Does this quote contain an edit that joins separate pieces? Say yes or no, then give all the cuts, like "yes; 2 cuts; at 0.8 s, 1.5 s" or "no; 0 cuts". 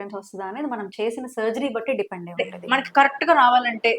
yes; 1 cut; at 2.5 s